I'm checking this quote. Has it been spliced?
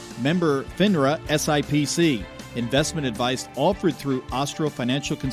no; 0 cuts

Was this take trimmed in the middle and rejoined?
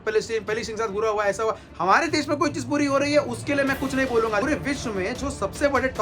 yes; 1 cut; at 4.4 s

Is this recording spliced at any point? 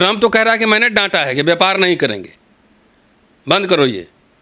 no; 0 cuts

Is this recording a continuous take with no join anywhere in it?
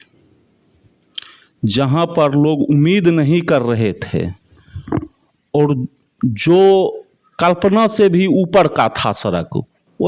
yes; 0 cuts

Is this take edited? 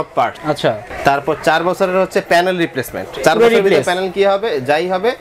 yes; 2 cuts; at 0.9 s, 3.0 s

